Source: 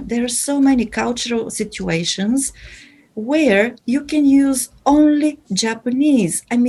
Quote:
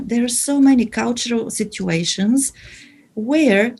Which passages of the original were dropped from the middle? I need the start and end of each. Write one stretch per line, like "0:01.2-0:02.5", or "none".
none